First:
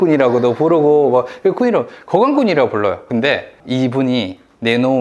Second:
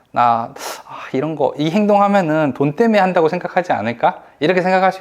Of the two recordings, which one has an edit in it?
first; 1 cut; at 3.3 s

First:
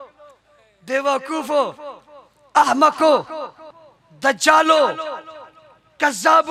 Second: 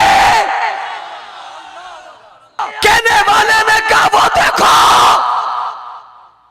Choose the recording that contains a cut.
second; 1 cut; at 2.7 s

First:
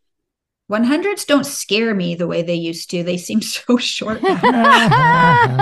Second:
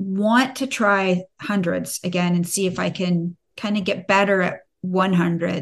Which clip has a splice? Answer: first; 1 cut; at 4.2 s

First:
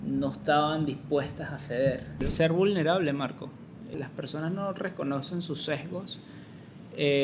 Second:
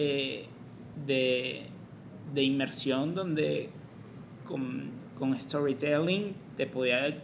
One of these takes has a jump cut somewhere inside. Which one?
first; 2 cuts; at 2.3 s, 3.9 s

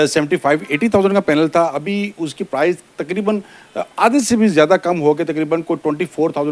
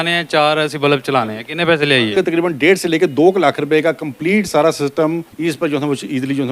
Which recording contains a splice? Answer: second; 2 cuts; at 2.1 s, 5.3 s

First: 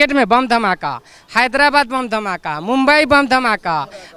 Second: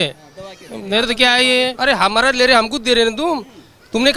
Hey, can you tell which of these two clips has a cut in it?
second; 1 cut; at 1.8 s

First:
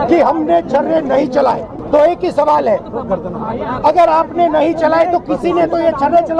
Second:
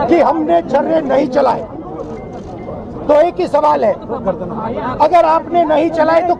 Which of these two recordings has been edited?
first; 1 cut; at 1.7 s

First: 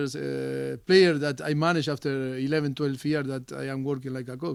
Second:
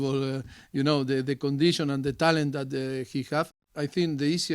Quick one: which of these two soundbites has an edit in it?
second; 1 cut; at 3.6 s

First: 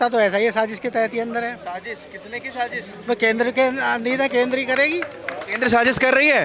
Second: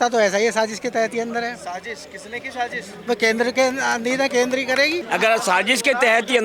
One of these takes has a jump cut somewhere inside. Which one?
second; 1 cut; at 5.0 s

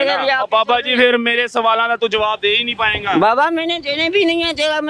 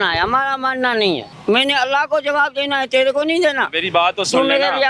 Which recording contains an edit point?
second; 1 cut; at 1.3 s

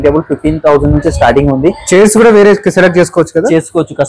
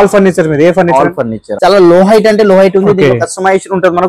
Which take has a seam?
second; 1 cut; at 1.4 s

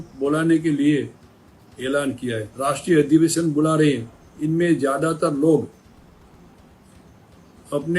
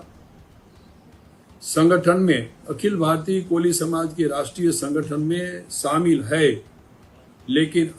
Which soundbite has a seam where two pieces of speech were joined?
first; 1 cut; at 2.5 s

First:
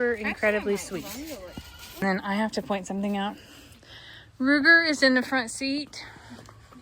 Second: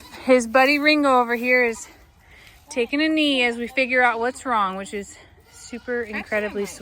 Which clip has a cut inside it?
first; 1 cut; at 2.0 s

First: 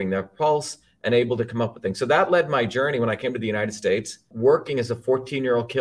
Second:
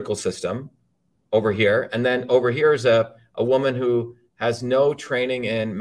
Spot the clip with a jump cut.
first; 1 cut; at 4.3 s

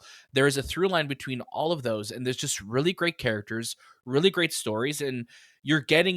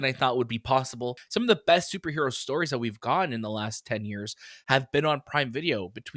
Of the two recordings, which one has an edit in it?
second; 1 cut; at 1.2 s

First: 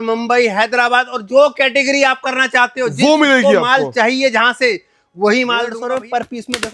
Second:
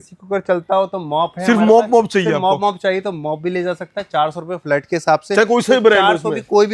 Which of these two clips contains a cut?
first; 1 cut; at 5.7 s

